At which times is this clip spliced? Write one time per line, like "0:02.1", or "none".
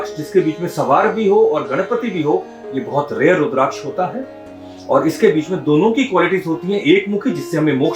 none